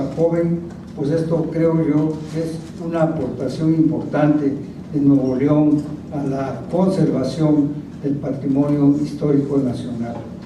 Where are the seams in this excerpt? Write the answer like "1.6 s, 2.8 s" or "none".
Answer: none